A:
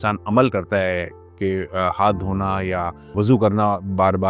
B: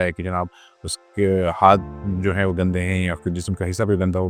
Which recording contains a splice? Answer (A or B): A